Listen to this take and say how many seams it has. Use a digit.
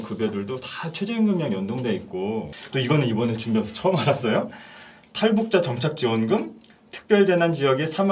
1